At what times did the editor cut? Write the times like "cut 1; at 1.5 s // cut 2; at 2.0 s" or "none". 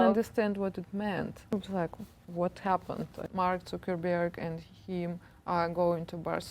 cut 1; at 1.5 s // cut 2; at 3.2 s